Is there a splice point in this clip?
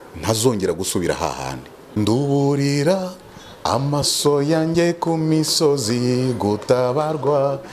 yes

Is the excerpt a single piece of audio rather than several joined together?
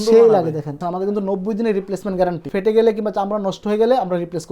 no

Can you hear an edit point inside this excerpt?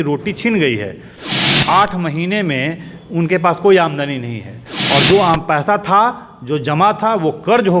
no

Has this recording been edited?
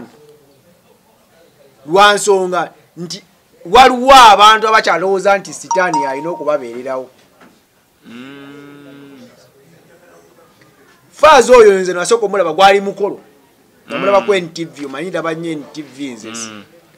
no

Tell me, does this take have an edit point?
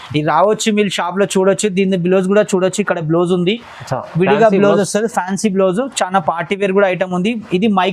no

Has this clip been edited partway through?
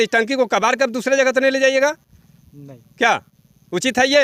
no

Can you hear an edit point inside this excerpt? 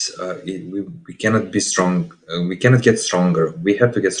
no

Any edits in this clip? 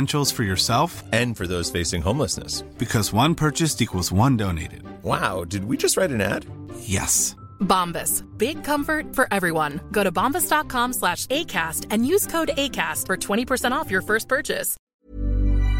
yes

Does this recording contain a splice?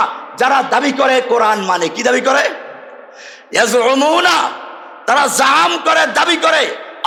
no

